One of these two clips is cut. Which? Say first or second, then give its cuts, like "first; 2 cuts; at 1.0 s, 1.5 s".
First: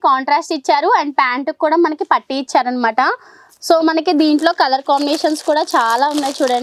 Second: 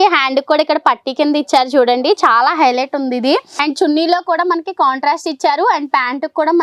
second; 1 cut; at 3.5 s